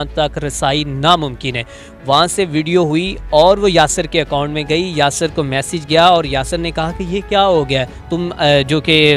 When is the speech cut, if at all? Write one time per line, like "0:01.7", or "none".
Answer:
none